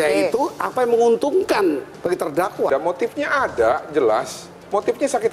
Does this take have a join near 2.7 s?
yes; 1 cut; at 2.7 s

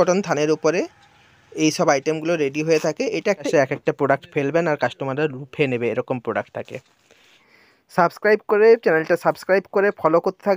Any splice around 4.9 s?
no; 2 cuts; at 3.5 s, 7.5 s

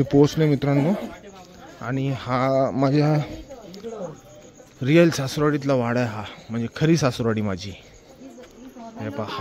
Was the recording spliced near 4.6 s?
no; 0 cuts

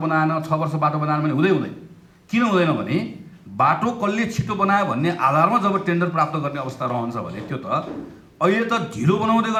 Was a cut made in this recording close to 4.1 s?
no; 0 cuts

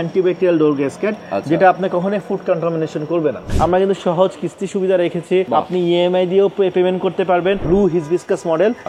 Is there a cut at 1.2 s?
no; 3 cuts; at 3.5 s, 5.5 s, 7.6 s

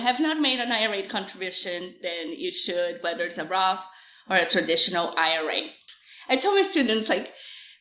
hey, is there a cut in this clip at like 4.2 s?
no; 1 cut; at 5.8 s

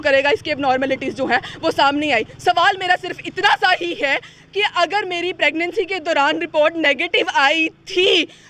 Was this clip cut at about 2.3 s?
no; 0 cuts

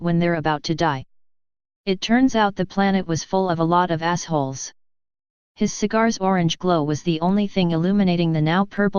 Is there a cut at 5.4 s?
no; 1 cut; at 7.4 s

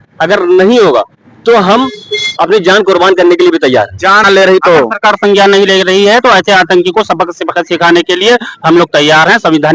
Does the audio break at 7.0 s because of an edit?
no; 1 cut; at 4.2 s

